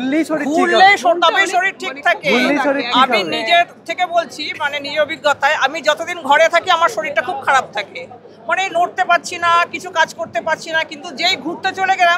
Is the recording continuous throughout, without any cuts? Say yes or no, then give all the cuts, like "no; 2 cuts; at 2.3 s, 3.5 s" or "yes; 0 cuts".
yes; 0 cuts